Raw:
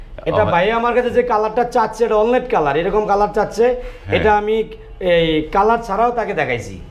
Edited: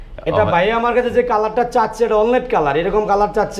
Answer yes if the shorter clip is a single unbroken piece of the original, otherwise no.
yes